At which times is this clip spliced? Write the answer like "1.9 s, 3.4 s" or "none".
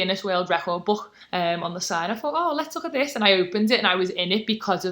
1.2 s